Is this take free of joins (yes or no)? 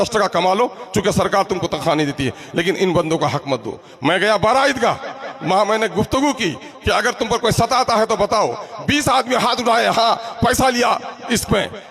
yes